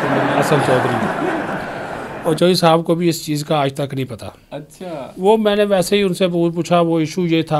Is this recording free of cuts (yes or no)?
yes